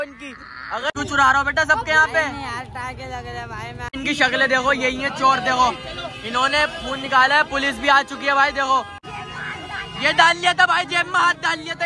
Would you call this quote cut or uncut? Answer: cut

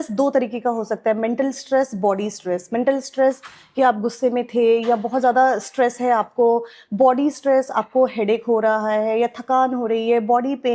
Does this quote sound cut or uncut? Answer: uncut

